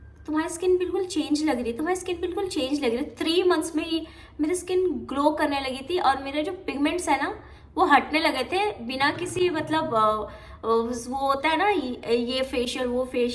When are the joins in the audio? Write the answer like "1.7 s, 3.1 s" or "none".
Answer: none